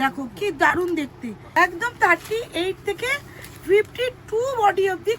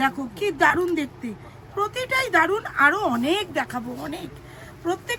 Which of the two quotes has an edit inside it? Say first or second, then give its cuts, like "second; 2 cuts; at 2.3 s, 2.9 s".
first; 1 cut; at 1.4 s